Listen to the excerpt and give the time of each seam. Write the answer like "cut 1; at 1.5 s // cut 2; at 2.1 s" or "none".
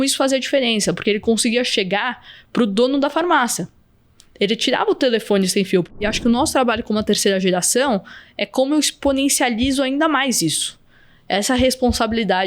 cut 1; at 6.0 s